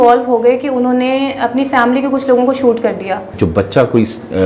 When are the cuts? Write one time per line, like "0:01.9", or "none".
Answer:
0:03.3